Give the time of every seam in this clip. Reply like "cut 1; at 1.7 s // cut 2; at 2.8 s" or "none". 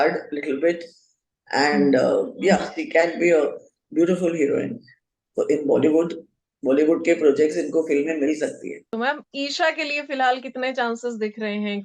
cut 1; at 8.8 s